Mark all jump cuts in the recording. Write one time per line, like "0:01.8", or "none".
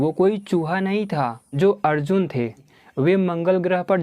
0:01.4
0:02.7